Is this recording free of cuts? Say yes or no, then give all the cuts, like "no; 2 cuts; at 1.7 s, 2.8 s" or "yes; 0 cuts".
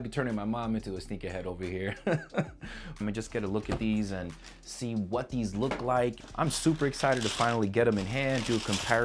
no; 2 cuts; at 3.0 s, 6.2 s